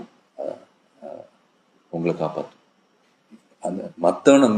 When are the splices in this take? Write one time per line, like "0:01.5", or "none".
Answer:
0:01.6